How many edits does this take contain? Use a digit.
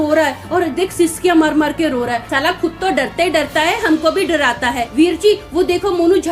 2